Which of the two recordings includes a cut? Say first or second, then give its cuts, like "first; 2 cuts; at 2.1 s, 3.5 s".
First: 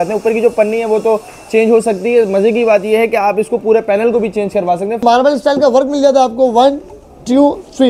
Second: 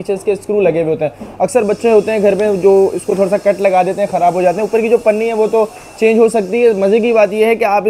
first; 1 cut; at 5.0 s